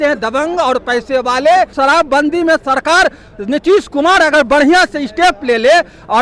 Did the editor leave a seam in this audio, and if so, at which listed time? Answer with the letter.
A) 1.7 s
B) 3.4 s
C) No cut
A